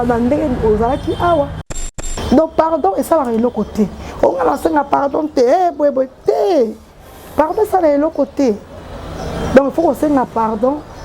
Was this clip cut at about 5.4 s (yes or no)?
no